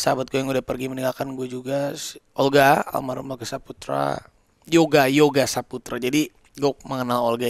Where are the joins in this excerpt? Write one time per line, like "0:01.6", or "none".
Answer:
none